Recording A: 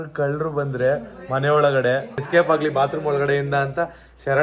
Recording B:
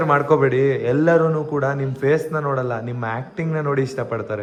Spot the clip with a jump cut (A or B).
A